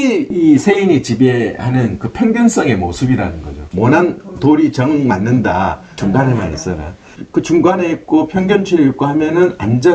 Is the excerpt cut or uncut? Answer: cut